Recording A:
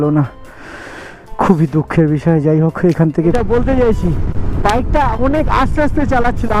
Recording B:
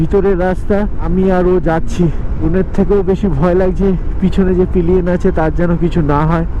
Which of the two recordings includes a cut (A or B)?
A